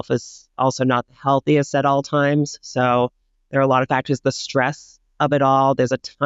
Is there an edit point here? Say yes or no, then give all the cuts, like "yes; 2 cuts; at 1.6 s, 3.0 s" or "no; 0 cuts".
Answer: no; 0 cuts